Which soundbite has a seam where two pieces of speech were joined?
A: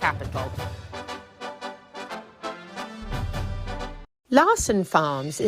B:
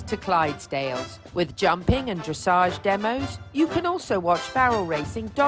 A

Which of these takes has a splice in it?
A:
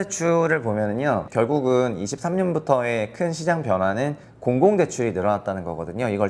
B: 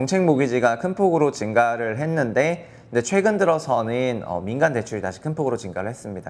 A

